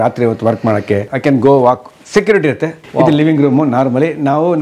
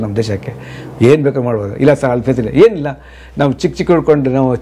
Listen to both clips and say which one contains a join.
first; 2 cuts; at 1.1 s, 2.8 s

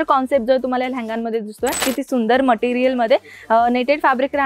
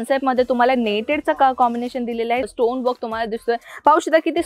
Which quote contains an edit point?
first; 1 cut; at 1.8 s

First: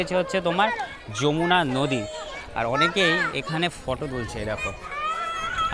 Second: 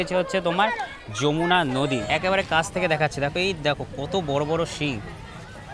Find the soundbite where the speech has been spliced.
second; 1 cut; at 2.0 s

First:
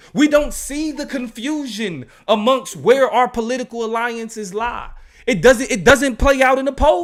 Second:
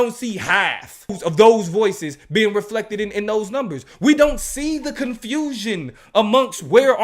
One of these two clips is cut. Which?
second; 1 cut; at 1.2 s

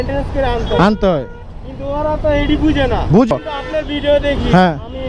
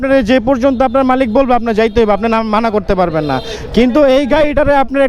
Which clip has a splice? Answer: first; 1 cut; at 3.3 s

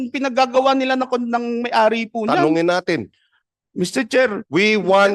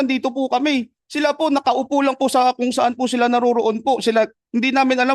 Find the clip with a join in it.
first; 1 cut; at 2.4 s

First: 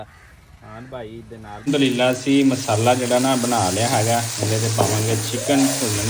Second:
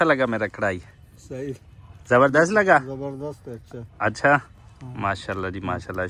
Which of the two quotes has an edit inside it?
first; 1 cut; at 1.5 s

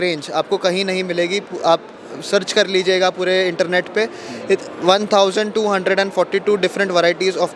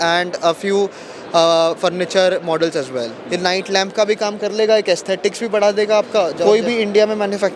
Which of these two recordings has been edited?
second; 2 cuts; at 3.2 s, 6.4 s

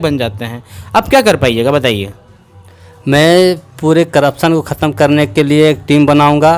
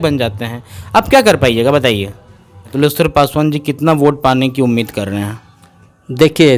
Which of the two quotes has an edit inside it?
second; 1 cut; at 2.6 s

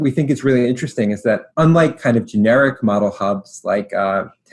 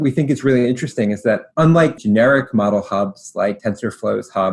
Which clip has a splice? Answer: second; 2 cuts; at 2.0 s, 3.6 s

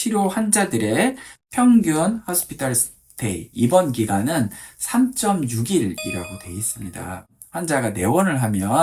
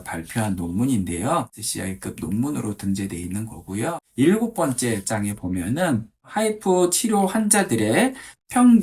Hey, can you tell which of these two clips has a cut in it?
second; 1 cut; at 3.9 s

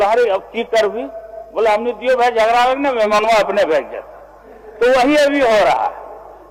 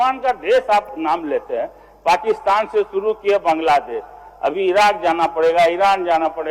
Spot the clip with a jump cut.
second; 1 cut; at 0.9 s

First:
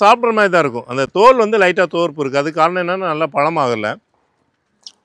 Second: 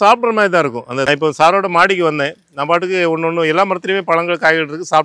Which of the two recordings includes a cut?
second; 1 cut; at 1.1 s

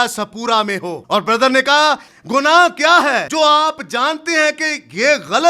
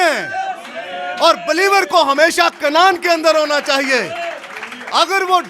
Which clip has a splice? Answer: first; 3 cuts; at 1.0 s, 2.1 s, 3.3 s

